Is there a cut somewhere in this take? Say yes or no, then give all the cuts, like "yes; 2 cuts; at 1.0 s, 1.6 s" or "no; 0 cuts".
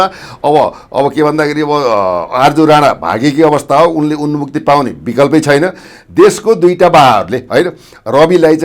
yes; 1 cut; at 5.9 s